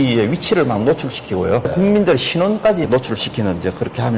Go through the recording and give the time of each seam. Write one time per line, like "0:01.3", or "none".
0:01.7